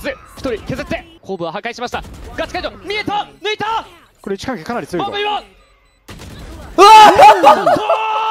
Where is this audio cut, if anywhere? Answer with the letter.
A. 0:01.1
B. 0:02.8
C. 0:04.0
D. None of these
A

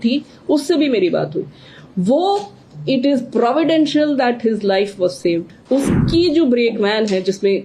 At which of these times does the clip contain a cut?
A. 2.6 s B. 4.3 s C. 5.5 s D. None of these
C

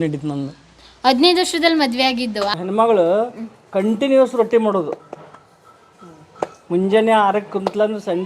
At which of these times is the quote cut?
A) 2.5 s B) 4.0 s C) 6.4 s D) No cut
A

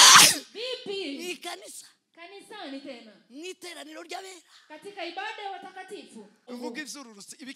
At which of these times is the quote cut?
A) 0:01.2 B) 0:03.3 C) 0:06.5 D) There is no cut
C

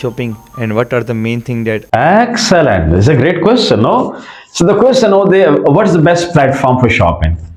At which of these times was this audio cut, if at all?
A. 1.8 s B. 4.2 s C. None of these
A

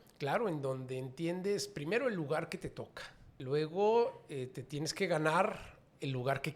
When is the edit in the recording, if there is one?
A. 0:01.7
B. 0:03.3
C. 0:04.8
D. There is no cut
B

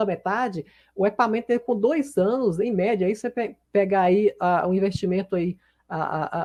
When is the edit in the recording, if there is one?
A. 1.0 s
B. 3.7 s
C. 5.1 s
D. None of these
D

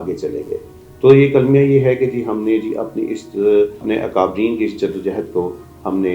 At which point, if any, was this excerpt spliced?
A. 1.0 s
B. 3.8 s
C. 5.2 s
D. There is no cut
B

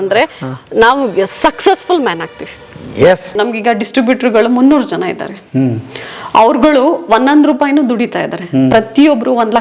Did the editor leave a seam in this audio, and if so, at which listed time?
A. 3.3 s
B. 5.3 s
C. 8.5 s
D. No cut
A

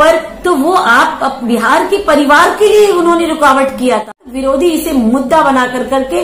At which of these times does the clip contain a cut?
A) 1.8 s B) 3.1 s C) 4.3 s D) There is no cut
C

